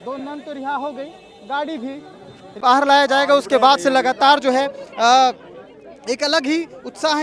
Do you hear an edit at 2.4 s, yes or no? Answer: yes